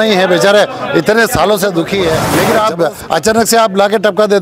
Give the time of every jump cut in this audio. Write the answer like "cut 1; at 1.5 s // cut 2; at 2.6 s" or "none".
cut 1; at 2.3 s